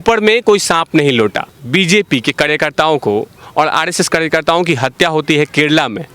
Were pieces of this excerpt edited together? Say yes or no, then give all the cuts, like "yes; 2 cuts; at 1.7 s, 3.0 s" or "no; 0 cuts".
yes; 1 cut; at 1.5 s